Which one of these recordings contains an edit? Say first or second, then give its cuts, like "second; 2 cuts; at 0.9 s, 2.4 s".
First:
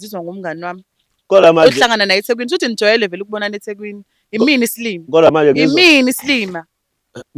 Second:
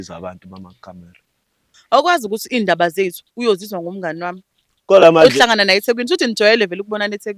second; 1 cut; at 1.7 s